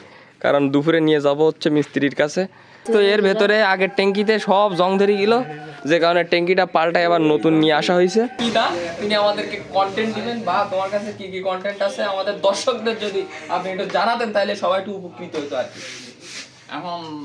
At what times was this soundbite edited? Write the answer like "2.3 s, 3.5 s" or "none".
2.8 s, 8.4 s